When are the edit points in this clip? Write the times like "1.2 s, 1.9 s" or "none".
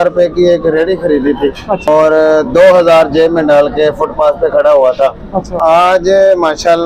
1.9 s, 5.5 s